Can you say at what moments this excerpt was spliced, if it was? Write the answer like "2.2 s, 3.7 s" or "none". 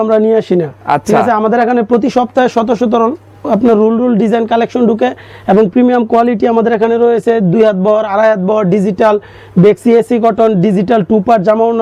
none